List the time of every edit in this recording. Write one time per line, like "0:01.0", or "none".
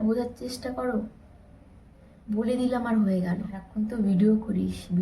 0:03.6

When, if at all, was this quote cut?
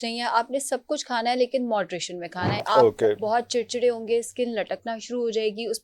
0:02.6

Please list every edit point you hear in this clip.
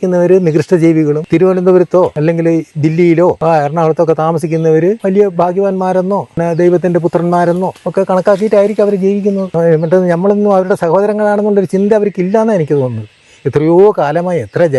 0:01.2
0:02.1
0:03.4
0:05.0
0:06.4
0:07.8
0:09.5

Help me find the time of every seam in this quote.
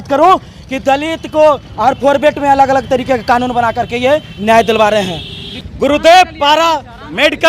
0:05.5

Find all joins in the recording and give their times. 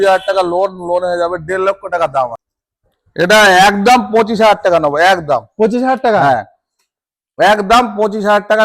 0:02.4

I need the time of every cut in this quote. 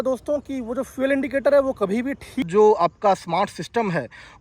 0:02.5

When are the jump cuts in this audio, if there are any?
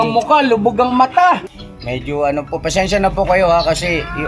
0:01.5

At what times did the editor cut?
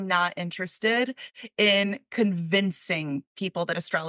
none

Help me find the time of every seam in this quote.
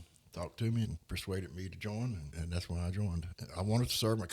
0:01.0
0:02.3
0:03.4

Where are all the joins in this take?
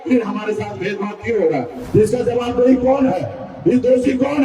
0:01.8

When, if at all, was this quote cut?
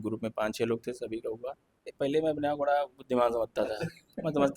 0:01.9

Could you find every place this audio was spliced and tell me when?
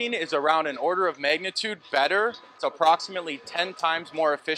0:02.5

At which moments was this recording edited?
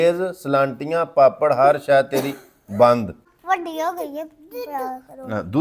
0:03.3

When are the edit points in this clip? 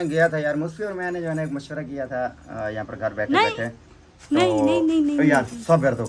none

